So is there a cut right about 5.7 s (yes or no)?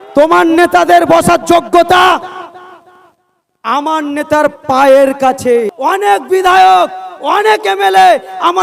yes